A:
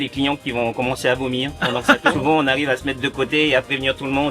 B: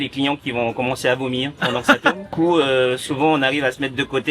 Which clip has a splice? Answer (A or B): A